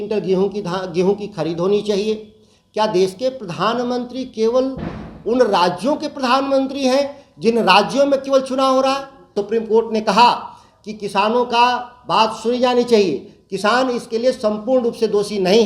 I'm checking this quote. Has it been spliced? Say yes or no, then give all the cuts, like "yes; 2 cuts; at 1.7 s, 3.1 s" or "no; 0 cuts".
yes; 1 cut; at 9.4 s